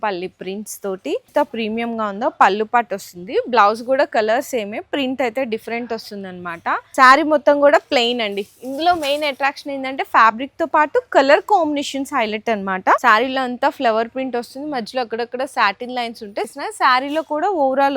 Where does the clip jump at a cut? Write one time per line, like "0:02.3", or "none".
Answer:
0:01.3
0:06.9
0:13.0
0:16.5